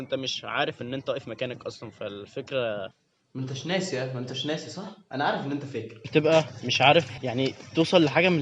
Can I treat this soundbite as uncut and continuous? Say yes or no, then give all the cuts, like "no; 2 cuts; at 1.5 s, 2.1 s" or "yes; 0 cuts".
no; 2 cuts; at 2.9 s, 6.1 s